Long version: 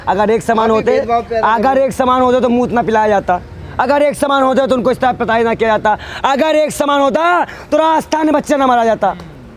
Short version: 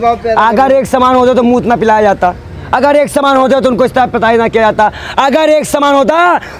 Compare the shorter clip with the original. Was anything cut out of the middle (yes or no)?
no